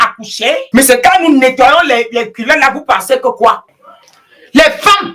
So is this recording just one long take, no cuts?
no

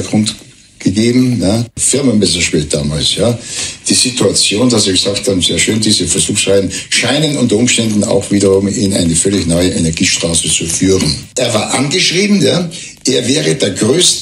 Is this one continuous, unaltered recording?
no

